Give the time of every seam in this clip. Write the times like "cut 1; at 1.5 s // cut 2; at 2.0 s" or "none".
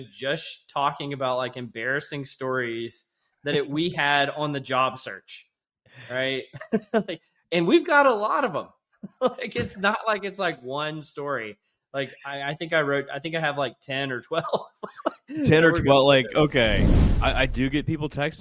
cut 1; at 17.0 s